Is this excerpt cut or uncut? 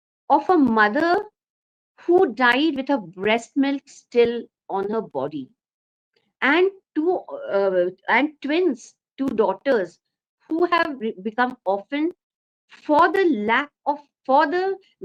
uncut